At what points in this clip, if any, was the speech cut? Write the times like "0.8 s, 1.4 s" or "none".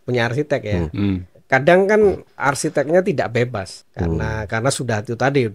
1.3 s, 2.4 s, 3.8 s